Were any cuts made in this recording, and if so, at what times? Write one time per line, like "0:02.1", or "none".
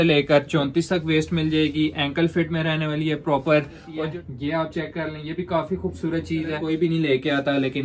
0:03.9
0:06.6